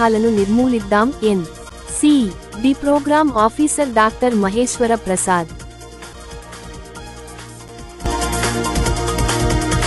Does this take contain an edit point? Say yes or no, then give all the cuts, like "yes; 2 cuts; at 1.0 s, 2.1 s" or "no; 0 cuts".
no; 0 cuts